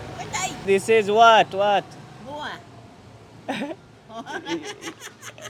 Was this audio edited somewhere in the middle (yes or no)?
no